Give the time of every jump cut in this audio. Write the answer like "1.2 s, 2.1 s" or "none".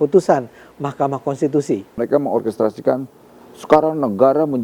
2.0 s

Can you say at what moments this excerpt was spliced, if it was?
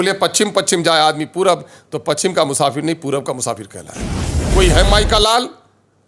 4.3 s

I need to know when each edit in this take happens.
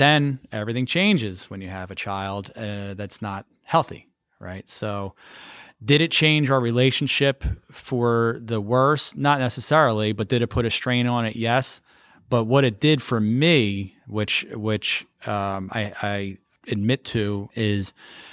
16.5 s, 17.5 s

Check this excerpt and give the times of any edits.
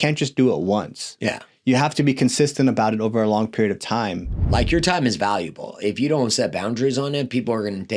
4.5 s

